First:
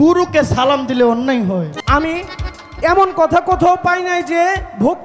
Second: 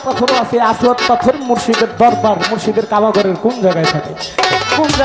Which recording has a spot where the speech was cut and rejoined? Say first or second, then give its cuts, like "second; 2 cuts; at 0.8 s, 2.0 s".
first; 1 cut; at 1.8 s